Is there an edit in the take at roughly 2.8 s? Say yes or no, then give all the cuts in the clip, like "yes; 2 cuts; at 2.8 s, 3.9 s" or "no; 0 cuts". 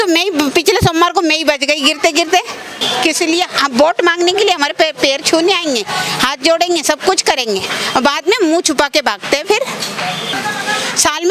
yes; 2 cuts; at 2.8 s, 10.3 s